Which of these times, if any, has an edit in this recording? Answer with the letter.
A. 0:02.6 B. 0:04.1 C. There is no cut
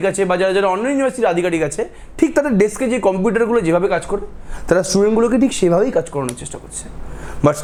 C